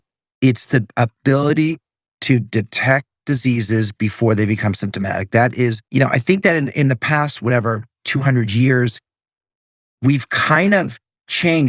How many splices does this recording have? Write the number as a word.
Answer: one